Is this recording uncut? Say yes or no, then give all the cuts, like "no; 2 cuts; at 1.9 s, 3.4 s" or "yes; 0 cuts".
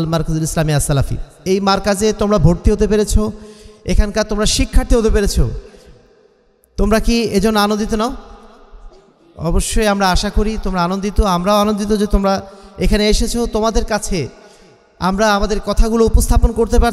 yes; 0 cuts